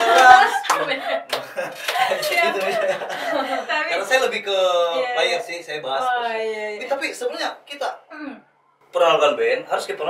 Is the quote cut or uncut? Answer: uncut